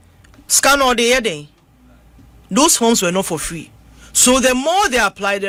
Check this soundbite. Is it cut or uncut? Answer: uncut